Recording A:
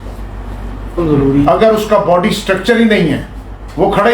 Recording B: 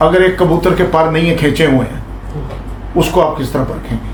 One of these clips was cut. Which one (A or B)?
A